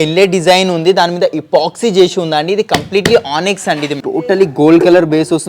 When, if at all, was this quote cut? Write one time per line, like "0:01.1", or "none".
0:03.9